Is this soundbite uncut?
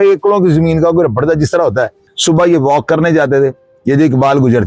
no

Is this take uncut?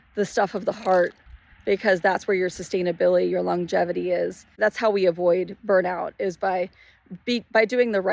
no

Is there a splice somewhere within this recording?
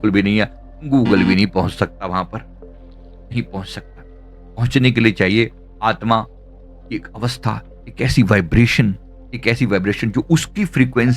no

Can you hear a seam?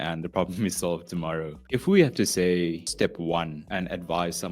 yes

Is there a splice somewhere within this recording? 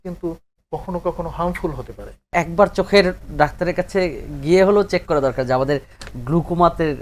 yes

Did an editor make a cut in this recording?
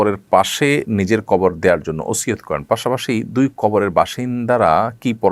no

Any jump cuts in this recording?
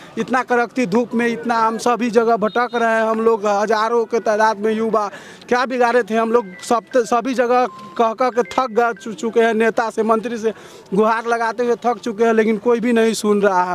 no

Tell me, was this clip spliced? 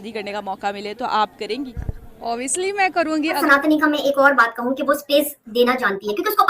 yes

